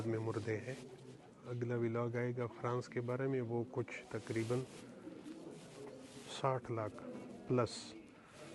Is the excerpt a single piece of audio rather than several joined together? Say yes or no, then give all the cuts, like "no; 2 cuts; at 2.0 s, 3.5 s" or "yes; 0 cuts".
no; 1 cut; at 1.4 s